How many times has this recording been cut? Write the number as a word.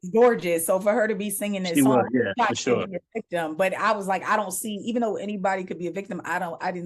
zero